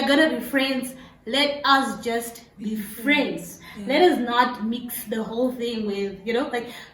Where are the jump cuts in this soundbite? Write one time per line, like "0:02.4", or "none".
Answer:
none